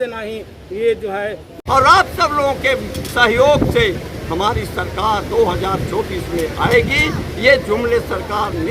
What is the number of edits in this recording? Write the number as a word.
one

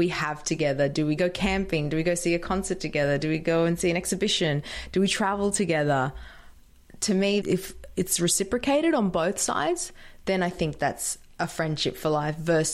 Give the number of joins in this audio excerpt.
one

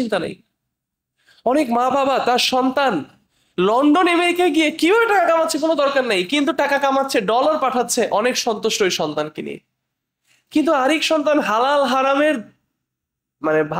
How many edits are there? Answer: zero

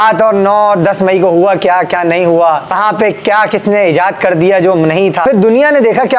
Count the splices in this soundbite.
two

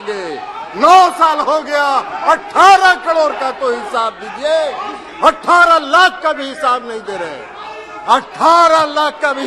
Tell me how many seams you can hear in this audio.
zero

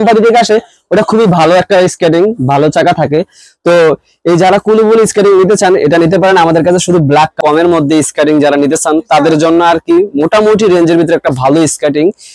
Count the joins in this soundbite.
one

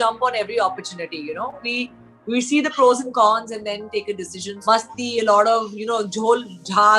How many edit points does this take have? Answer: one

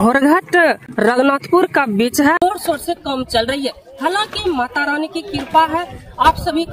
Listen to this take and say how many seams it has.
two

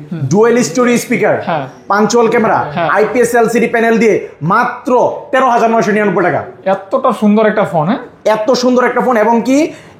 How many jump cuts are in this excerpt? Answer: zero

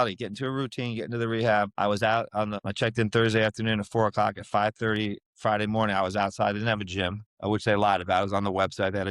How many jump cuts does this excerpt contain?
three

